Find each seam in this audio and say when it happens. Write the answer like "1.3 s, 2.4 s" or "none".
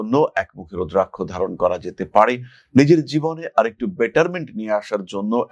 none